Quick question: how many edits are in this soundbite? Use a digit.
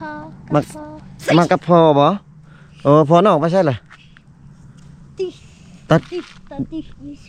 0